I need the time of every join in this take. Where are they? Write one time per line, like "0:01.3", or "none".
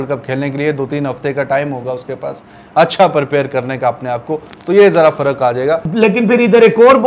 0:05.8